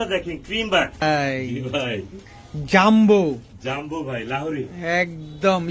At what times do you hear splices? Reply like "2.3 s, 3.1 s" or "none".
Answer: 1.0 s